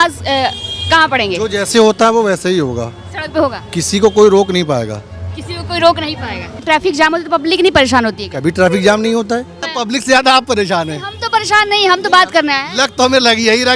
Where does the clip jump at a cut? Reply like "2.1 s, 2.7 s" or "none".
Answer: 6.6 s, 9.7 s